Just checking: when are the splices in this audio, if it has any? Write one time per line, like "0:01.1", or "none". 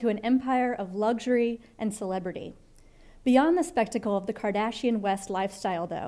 none